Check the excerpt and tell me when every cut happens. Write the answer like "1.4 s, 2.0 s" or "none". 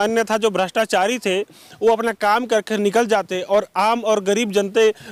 none